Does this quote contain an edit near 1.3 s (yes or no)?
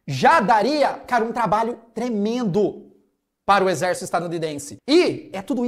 no